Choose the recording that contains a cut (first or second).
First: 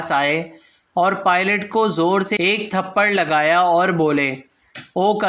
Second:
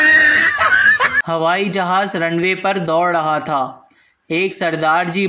second